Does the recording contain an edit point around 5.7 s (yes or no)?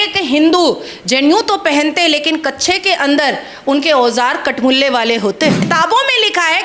yes